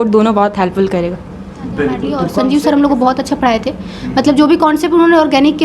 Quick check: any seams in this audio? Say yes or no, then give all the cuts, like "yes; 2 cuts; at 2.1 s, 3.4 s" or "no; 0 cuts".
yes; 1 cut; at 2.3 s